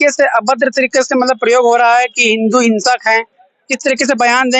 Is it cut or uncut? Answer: uncut